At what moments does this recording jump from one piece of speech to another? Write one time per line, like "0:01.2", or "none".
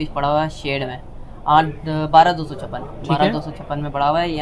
none